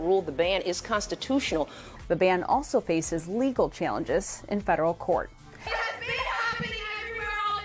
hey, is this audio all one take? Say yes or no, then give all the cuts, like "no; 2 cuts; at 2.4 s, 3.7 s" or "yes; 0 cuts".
no; 2 cuts; at 1.9 s, 5.8 s